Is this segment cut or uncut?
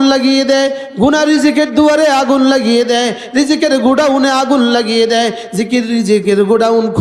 uncut